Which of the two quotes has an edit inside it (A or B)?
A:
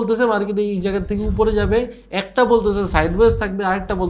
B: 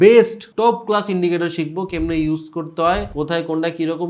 B